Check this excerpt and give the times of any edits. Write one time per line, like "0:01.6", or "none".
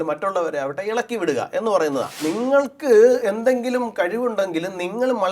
0:02.2